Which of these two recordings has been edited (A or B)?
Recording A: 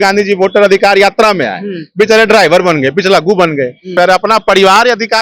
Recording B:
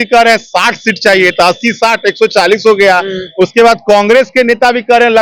A